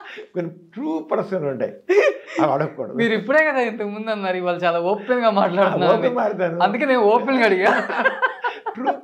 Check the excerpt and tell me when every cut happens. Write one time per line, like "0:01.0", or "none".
none

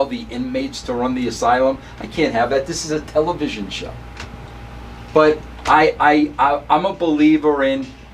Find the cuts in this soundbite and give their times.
none

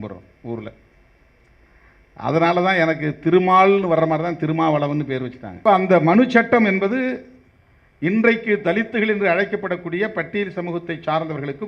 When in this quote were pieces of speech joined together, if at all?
0:05.4

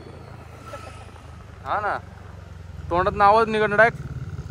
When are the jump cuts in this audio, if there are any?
none

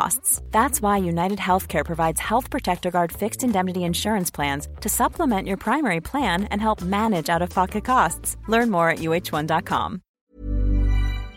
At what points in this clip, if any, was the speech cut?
0:10.2

